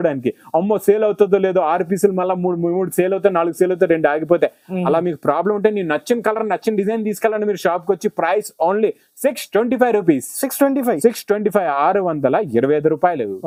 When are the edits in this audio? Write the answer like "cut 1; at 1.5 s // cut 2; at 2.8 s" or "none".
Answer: none